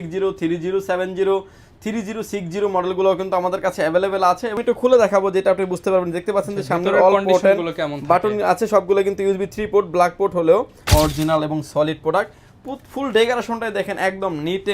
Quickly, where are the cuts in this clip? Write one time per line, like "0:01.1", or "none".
0:04.6
0:10.8